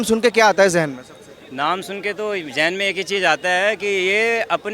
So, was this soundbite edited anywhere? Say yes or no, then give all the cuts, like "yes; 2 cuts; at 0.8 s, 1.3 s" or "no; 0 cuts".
no; 0 cuts